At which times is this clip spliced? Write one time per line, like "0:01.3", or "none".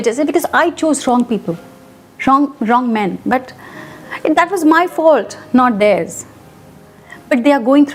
none